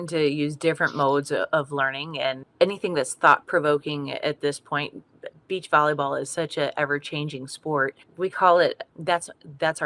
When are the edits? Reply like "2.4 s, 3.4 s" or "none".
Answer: 2.4 s